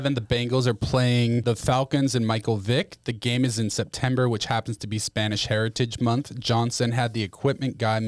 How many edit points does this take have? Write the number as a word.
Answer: one